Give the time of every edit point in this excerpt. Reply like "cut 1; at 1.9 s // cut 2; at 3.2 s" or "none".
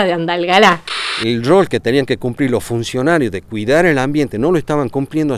cut 1; at 1.2 s